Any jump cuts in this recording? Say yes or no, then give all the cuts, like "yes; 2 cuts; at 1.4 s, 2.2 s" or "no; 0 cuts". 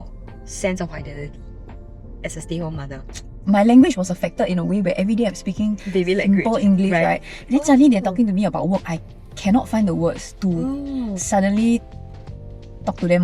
yes; 1 cut; at 3.4 s